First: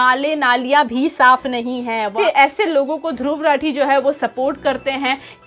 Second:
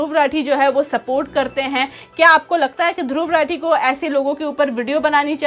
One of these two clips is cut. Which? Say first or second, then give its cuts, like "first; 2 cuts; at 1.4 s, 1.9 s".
first; 1 cut; at 2.2 s